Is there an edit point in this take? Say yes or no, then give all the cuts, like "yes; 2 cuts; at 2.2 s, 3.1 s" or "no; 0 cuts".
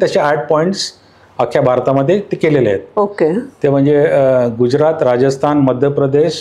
no; 0 cuts